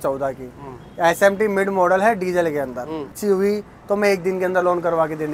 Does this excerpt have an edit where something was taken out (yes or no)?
yes